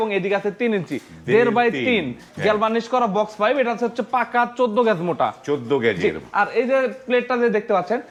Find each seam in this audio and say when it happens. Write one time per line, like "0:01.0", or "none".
none

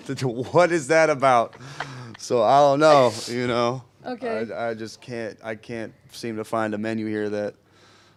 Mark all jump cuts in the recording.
none

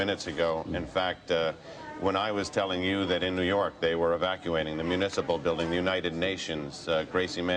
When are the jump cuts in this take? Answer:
0:05.3

